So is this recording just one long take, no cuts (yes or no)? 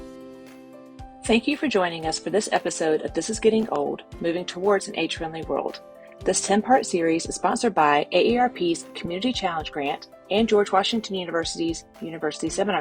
no